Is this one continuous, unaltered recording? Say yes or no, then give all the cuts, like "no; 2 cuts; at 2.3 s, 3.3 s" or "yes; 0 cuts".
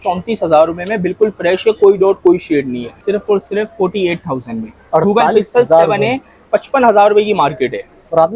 no; 1 cut; at 3.0 s